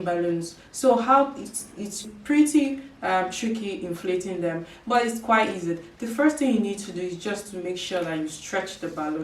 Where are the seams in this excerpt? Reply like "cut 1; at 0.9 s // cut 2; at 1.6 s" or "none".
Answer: cut 1; at 2.1 s